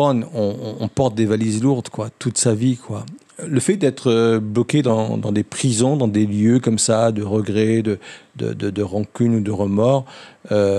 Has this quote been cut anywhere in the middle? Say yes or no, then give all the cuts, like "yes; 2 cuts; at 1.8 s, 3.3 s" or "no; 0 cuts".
yes; 1 cut; at 3.1 s